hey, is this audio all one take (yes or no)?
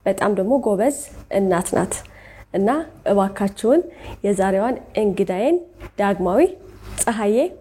yes